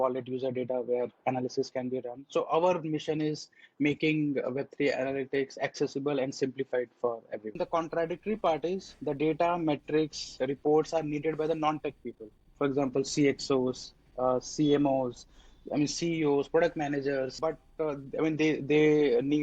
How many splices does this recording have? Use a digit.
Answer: 2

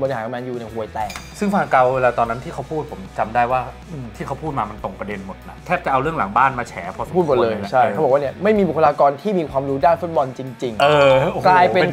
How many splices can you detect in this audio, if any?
0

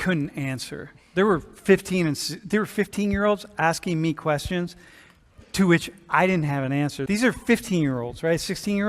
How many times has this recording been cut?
1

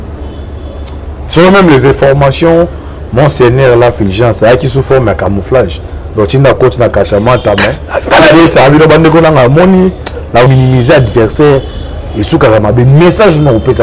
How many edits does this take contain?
1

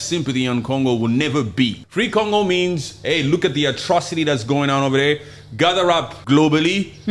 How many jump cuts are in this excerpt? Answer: 2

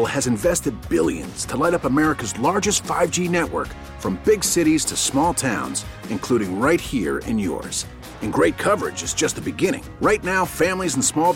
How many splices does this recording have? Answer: 0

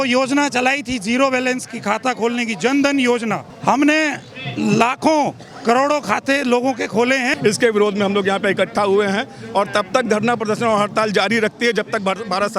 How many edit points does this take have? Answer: 2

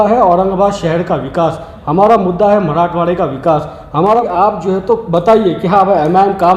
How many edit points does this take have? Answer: 1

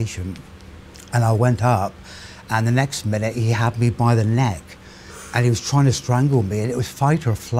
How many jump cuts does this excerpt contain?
1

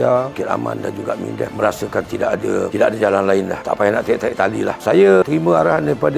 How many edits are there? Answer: 0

